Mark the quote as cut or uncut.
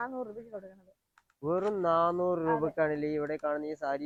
uncut